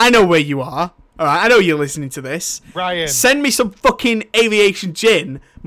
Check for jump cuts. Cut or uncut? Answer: uncut